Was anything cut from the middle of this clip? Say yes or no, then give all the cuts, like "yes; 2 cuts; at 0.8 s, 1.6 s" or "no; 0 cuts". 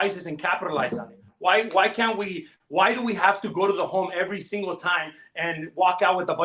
no; 0 cuts